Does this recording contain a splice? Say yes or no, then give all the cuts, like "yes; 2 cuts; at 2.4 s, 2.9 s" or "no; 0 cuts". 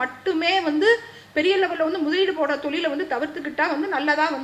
no; 0 cuts